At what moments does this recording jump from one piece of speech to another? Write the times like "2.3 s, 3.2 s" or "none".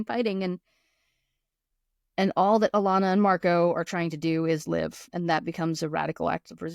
none